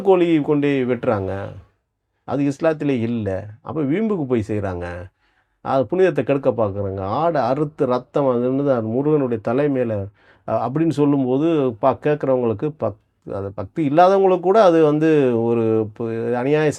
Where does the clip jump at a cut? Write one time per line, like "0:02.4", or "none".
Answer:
none